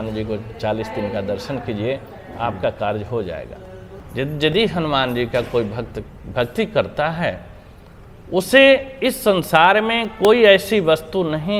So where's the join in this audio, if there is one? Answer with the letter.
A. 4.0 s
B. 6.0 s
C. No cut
A